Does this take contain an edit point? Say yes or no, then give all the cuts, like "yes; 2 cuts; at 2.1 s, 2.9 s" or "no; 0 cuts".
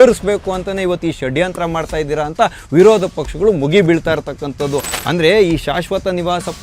yes; 1 cut; at 4.9 s